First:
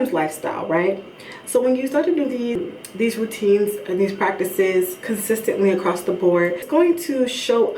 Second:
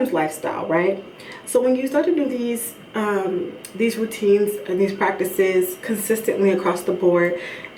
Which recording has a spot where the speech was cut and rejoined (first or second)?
first